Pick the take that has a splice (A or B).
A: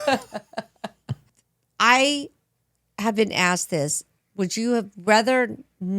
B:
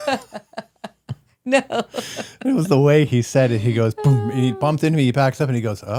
A